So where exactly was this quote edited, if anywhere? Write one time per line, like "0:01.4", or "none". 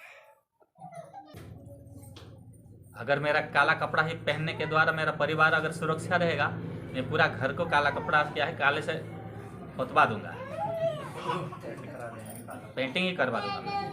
0:01.3